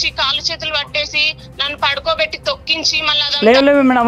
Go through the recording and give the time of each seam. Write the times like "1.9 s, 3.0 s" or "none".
3.1 s